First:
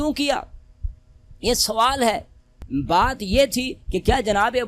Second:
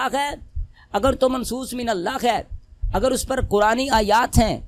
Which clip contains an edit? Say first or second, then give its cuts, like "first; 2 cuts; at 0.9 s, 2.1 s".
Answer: first; 1 cut; at 2.5 s